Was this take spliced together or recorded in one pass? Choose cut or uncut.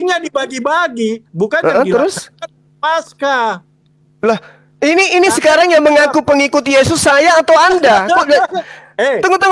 uncut